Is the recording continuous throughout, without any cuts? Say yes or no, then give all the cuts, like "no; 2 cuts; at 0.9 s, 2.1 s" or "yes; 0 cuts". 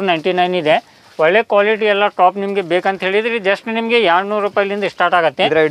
yes; 0 cuts